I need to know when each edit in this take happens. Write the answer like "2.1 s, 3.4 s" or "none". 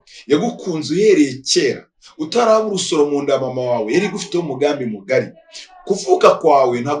none